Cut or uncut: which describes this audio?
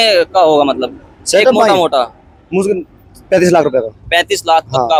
uncut